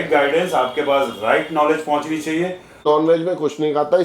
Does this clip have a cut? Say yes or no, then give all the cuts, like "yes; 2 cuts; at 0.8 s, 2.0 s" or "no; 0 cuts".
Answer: yes; 1 cut; at 2.9 s